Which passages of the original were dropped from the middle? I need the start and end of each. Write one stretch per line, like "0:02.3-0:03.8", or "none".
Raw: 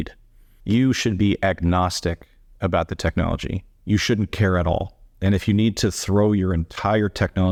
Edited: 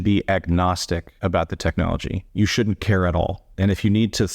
0:02.2-0:02.5
0:03.6-0:03.7
0:05.0-0:05.1